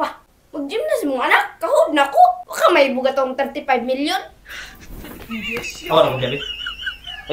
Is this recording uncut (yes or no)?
yes